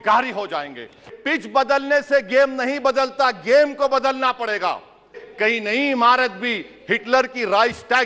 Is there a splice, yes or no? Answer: yes